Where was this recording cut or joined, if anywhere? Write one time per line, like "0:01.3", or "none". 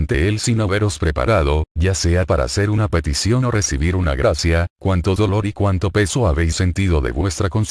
0:06.0